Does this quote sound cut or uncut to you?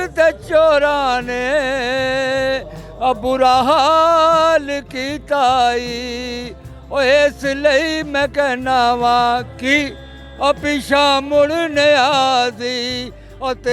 uncut